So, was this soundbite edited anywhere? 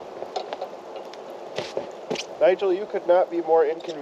no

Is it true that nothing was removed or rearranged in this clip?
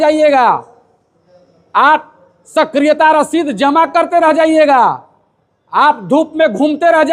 yes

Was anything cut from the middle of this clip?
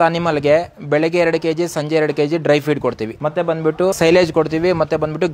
yes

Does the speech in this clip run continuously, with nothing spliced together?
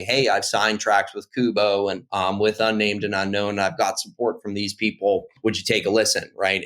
no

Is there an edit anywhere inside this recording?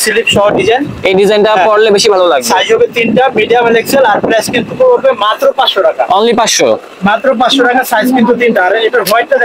no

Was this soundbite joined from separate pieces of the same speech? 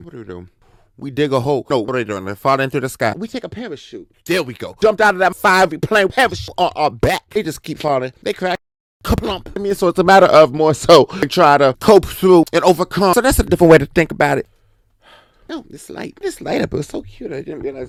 no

